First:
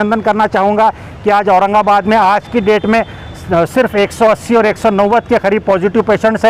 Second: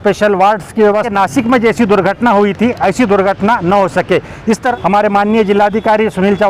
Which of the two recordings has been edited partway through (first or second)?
second